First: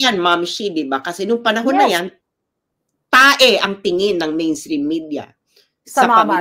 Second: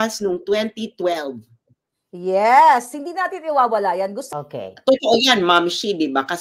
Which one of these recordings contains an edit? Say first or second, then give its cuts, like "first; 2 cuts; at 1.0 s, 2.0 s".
second; 1 cut; at 4.2 s